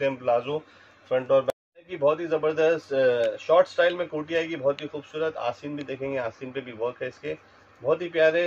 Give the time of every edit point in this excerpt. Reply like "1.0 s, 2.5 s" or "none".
1.5 s